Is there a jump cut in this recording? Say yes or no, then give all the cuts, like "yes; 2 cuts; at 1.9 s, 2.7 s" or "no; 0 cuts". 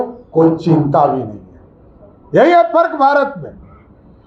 no; 0 cuts